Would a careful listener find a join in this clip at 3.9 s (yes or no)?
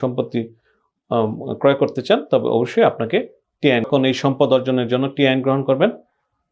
yes